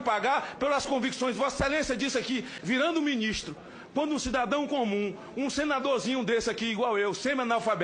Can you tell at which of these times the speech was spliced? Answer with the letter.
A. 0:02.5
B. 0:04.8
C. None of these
A